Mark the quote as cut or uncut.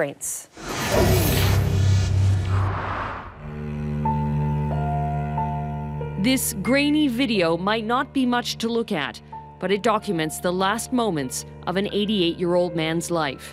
uncut